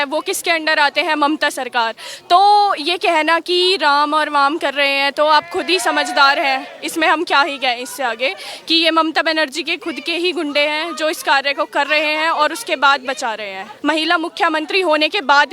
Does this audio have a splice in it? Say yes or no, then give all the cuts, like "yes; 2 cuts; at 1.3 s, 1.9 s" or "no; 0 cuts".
yes; 1 cut; at 13.7 s